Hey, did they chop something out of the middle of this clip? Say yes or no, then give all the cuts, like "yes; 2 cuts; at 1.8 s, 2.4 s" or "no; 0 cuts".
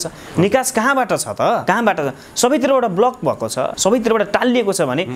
yes; 2 cuts; at 1.6 s, 3.7 s